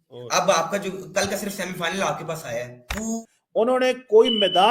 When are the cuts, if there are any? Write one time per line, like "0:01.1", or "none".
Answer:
0:03.2